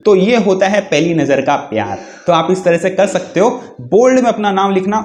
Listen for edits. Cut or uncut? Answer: uncut